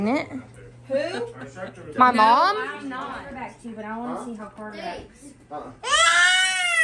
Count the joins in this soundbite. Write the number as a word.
one